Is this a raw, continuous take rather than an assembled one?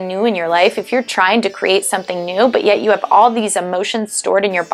yes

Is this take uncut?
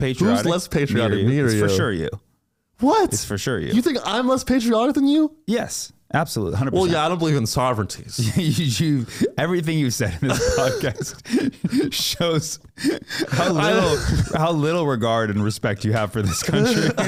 yes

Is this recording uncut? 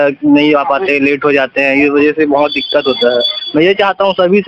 yes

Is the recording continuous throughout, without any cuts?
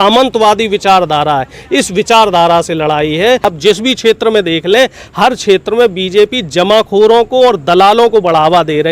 no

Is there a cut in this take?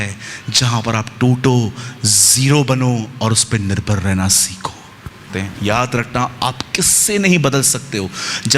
yes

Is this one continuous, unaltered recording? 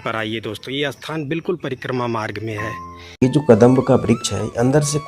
no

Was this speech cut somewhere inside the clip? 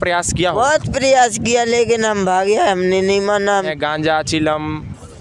yes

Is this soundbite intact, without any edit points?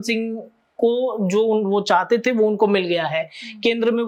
yes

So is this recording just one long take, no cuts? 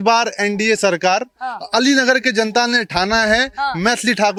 yes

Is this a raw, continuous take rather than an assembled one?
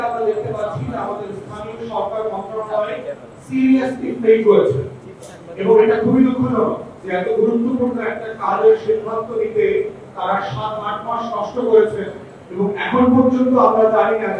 yes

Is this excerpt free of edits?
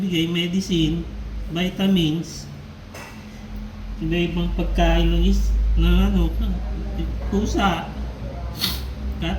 yes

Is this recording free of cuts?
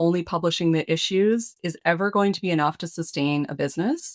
yes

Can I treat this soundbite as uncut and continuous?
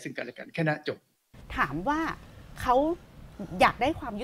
no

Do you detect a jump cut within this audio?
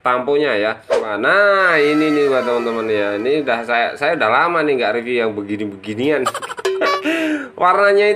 yes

